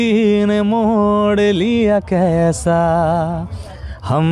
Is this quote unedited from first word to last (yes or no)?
yes